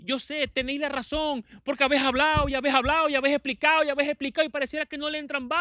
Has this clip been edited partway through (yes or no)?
no